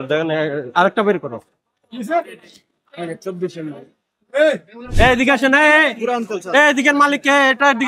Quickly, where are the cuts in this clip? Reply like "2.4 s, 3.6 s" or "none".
4.8 s

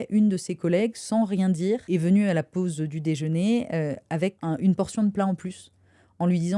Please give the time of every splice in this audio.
1.8 s, 4.4 s

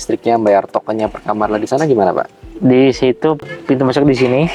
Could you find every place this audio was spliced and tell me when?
3.4 s

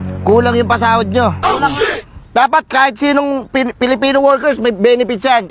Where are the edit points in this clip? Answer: none

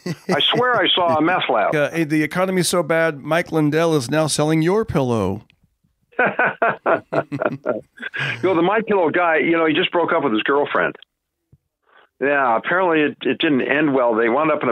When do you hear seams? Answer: 1.7 s

